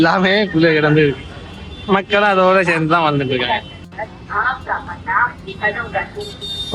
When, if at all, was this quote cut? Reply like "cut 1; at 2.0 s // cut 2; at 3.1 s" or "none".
none